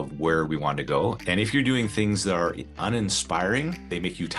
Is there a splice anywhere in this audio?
yes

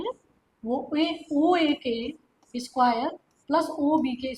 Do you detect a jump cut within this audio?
no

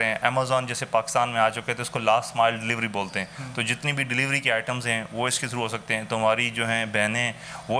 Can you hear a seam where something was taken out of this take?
no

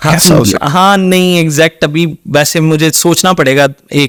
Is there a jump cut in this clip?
no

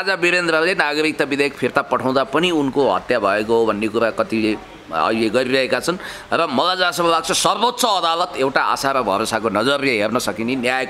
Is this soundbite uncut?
yes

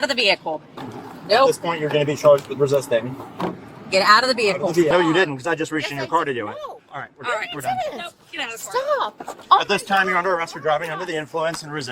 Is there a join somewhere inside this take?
yes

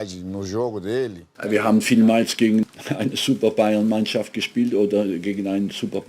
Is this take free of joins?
no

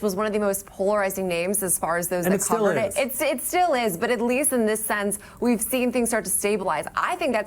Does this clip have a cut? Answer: no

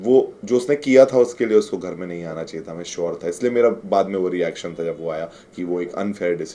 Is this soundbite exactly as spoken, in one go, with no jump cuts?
yes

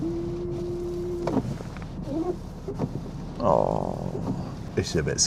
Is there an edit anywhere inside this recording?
no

